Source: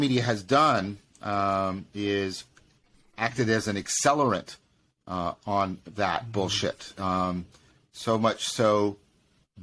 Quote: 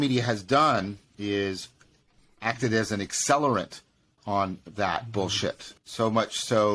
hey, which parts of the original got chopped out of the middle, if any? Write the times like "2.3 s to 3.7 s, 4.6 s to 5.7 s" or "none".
1.1 s to 1.9 s, 5.0 s to 5.4 s, 6.9 s to 7.8 s